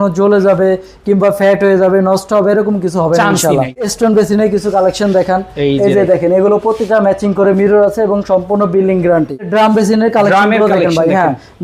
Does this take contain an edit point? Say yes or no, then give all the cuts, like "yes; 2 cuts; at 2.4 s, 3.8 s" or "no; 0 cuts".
yes; 2 cuts; at 3.9 s, 9.5 s